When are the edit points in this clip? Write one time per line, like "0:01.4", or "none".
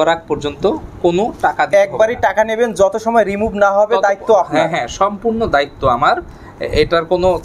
none